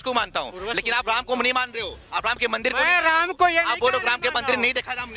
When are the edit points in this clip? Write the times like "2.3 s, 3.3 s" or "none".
none